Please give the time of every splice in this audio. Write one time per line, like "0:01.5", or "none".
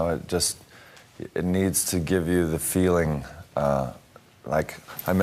0:01.2